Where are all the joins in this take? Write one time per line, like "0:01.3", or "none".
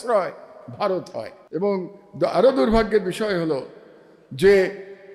0:01.4

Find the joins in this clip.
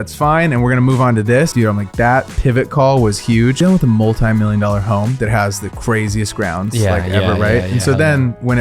0:01.5
0:03.6

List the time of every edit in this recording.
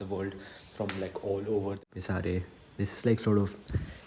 0:01.8

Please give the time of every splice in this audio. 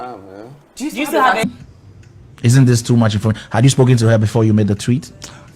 0:01.4

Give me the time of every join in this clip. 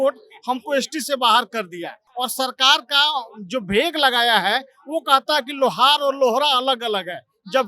0:02.0

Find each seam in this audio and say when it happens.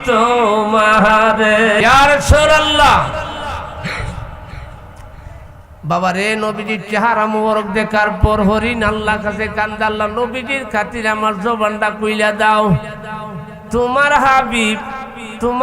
0:01.8

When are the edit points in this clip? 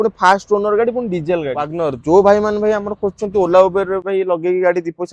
0:01.8

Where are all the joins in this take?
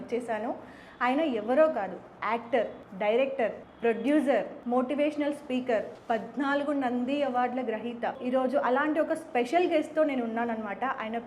0:02.8
0:03.7
0:04.6
0:05.9
0:08.2

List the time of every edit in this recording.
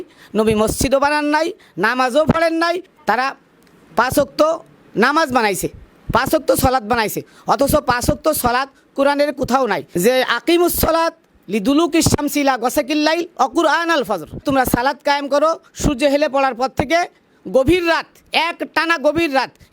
0:02.9
0:09.9
0:14.4

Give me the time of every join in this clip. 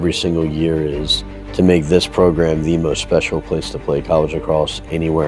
none

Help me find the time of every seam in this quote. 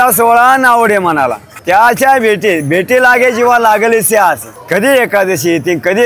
0:01.5
0:04.5

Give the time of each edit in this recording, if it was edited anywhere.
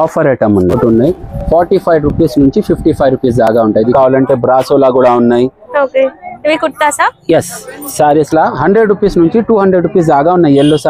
0:00.7
0:03.9

